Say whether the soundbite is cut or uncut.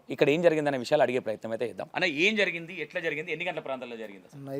cut